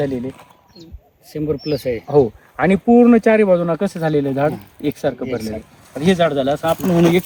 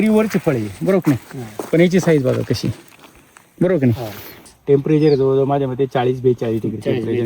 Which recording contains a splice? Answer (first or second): second